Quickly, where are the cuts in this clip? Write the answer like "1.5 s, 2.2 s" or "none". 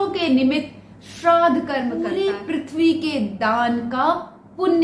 2.0 s